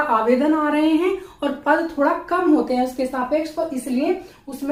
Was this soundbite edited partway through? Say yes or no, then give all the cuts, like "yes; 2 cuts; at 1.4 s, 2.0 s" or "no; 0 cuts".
no; 0 cuts